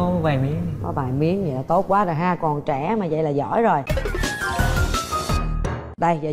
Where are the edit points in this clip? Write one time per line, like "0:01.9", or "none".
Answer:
none